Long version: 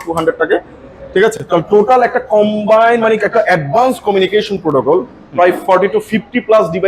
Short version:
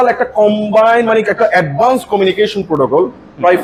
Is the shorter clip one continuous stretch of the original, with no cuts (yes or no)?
yes